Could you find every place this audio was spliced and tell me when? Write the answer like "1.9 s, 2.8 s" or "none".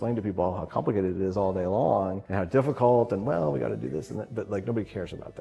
2.2 s